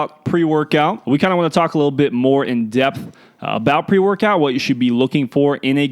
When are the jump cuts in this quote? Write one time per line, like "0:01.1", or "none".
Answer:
0:01.0